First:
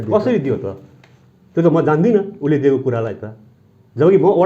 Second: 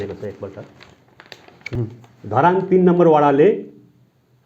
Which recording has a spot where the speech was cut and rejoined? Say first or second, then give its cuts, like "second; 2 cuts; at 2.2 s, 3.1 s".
second; 1 cut; at 1.5 s